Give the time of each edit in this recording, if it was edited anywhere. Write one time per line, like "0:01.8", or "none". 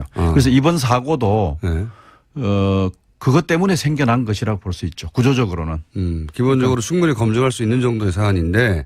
0:05.9